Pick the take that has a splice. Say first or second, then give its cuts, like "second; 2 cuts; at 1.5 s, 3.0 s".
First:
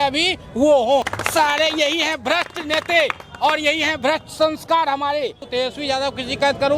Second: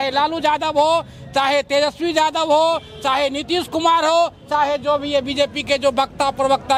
first; 2 cuts; at 1.2 s, 5.5 s